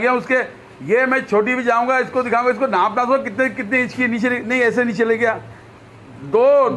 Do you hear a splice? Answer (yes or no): no